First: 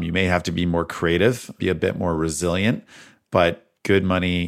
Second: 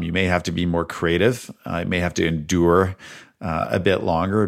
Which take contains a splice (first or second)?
first